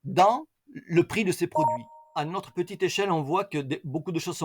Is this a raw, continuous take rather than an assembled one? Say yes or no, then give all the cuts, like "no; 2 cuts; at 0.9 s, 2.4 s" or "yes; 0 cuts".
no; 1 cut; at 2.0 s